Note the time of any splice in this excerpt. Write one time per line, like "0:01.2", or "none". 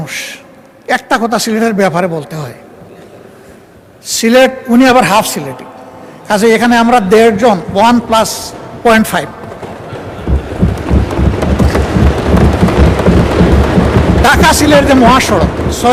none